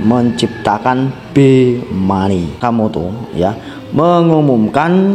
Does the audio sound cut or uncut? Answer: cut